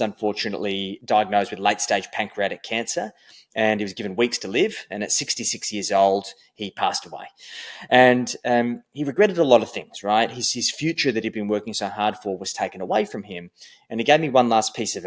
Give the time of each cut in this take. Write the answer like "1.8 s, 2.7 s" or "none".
0.9 s

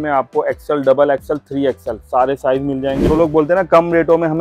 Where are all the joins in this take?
3.0 s

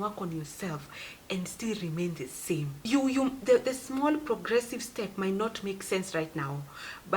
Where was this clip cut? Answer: 2.8 s

